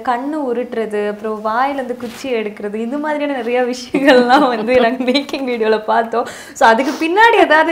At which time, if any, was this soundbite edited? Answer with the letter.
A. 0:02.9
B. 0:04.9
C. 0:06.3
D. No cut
D